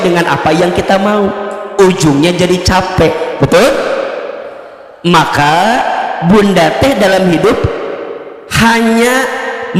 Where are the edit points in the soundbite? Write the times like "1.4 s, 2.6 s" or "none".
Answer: none